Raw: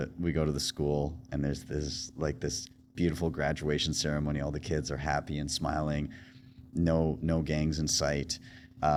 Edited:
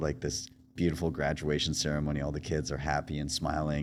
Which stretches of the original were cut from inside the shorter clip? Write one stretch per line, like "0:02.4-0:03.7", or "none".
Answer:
none